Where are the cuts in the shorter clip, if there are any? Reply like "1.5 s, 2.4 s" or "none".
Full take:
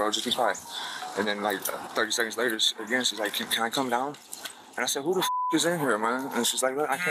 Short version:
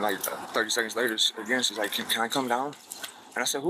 none